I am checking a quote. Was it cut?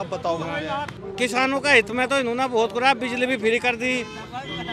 yes; 1 cut; at 1.0 s

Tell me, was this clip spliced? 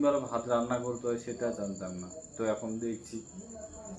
no; 0 cuts

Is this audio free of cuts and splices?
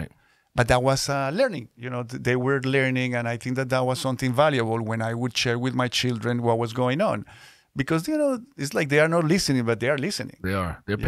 yes; 0 cuts

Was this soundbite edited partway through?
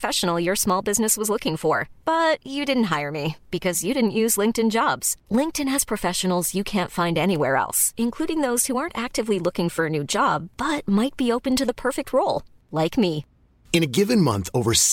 no; 0 cuts

